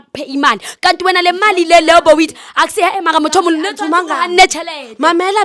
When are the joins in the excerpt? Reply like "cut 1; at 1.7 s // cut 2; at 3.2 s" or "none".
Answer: none